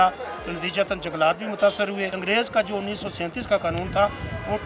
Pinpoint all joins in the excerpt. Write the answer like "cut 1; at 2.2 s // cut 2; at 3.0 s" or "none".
cut 1; at 2.1 s